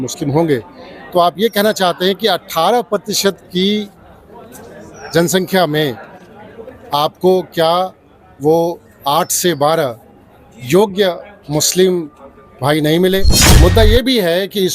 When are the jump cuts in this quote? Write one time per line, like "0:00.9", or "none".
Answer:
0:13.4